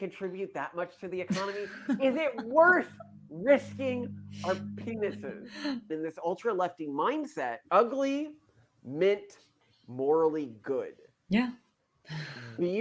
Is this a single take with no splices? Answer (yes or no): no